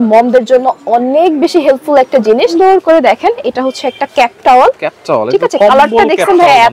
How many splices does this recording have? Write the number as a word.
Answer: one